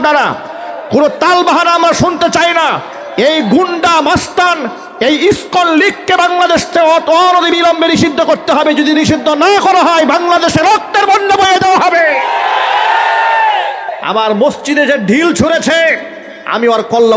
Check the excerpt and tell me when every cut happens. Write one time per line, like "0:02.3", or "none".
0:13.9